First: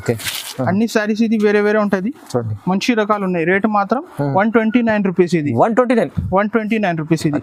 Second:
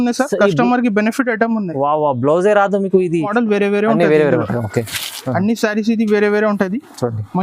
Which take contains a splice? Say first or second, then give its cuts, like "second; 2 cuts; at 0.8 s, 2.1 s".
second; 1 cut; at 3.3 s